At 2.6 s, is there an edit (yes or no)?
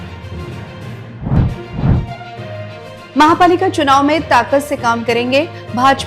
no